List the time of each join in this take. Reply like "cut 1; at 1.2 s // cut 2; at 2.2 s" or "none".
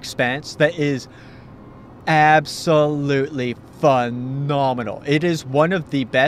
cut 1; at 4.7 s